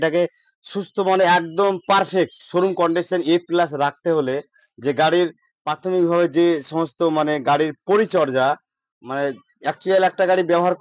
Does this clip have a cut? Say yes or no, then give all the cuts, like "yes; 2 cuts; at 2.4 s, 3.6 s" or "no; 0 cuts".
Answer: no; 0 cuts